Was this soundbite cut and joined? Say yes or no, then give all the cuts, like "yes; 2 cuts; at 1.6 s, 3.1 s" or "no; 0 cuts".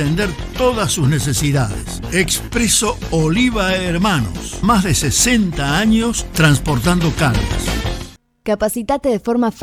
no; 0 cuts